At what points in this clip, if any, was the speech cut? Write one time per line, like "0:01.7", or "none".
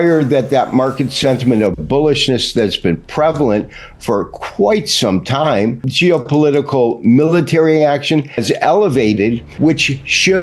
0:05.9
0:08.3
0:09.5